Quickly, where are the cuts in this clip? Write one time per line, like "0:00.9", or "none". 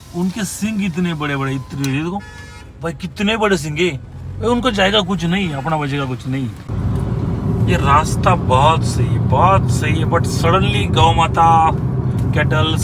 0:06.6